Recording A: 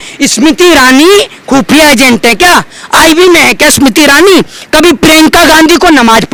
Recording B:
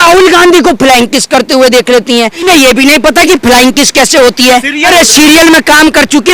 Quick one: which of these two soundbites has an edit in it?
B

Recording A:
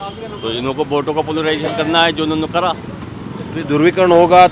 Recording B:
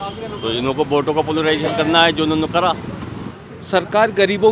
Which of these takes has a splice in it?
B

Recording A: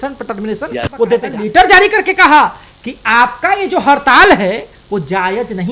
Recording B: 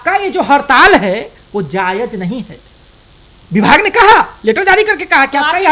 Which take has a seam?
A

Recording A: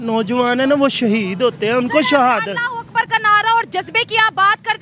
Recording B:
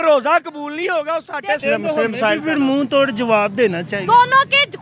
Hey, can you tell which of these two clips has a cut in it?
B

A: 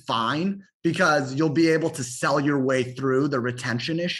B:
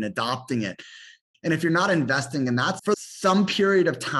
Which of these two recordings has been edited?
B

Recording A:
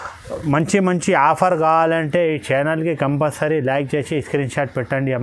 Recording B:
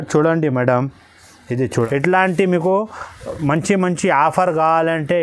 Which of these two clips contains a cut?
B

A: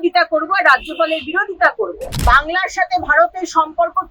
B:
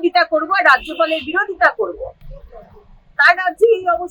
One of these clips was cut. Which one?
A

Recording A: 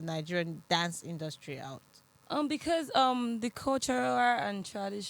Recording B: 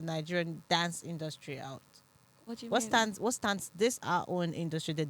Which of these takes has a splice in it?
A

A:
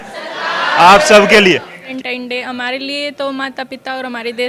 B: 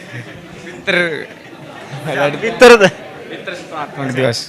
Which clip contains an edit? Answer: A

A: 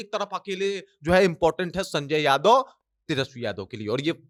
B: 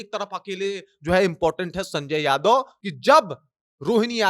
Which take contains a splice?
B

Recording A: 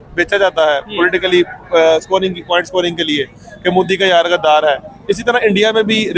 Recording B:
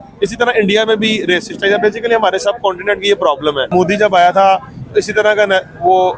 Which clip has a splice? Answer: B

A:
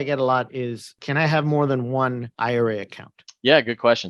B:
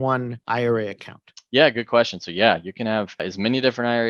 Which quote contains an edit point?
A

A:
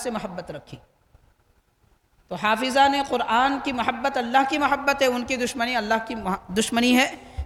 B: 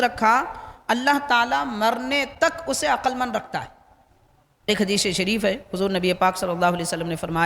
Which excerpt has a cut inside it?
B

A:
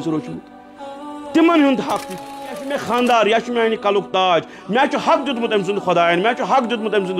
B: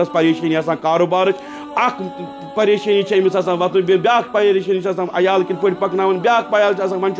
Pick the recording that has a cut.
A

